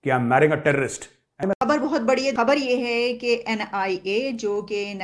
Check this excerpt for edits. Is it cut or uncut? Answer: cut